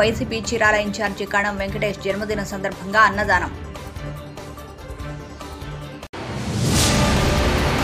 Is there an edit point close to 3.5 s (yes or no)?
no